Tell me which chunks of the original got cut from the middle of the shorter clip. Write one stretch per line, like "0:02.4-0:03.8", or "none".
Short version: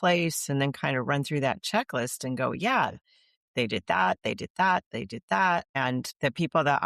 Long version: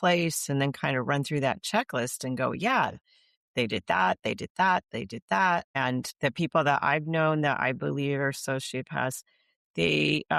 none